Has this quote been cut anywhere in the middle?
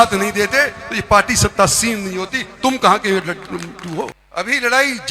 yes; 1 cut; at 4.2 s

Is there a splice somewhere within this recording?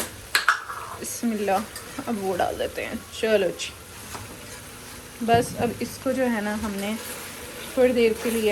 no; 0 cuts

